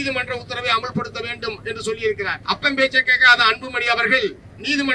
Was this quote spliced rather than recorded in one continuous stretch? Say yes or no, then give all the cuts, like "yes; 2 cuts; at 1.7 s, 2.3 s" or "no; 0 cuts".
yes; 1 cut; at 2.4 s